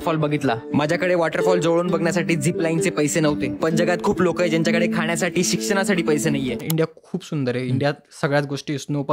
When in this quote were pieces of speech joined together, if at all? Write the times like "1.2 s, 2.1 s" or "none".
6.6 s